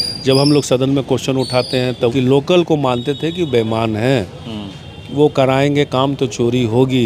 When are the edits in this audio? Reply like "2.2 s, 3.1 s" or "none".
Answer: 2.1 s